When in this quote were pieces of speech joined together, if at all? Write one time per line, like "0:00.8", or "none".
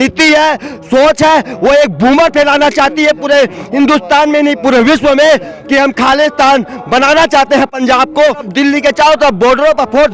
0:08.4

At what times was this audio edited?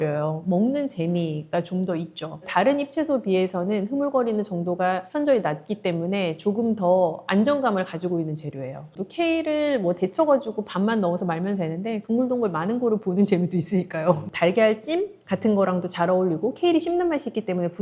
0:08.8
0:14.2

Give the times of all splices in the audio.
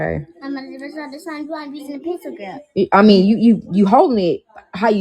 0:02.0
0:04.0

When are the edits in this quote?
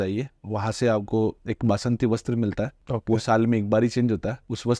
none

